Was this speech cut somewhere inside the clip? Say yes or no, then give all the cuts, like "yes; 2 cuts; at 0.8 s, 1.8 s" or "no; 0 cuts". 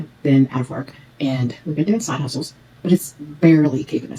no; 0 cuts